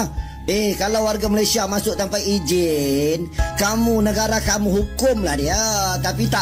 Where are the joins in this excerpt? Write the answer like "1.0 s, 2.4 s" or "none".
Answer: none